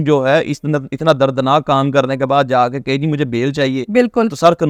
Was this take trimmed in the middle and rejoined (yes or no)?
no